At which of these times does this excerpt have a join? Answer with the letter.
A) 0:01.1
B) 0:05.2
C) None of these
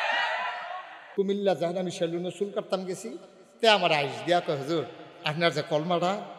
A